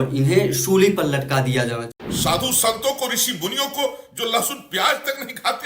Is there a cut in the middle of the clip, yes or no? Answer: yes